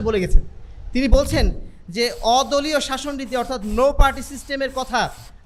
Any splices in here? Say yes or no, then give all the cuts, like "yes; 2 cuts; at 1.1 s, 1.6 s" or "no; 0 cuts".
no; 0 cuts